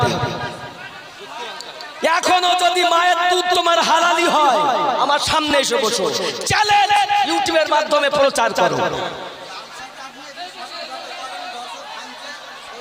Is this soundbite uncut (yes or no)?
yes